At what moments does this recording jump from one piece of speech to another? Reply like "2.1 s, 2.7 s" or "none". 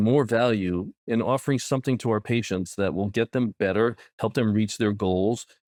none